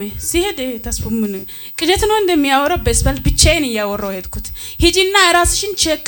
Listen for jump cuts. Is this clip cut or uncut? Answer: uncut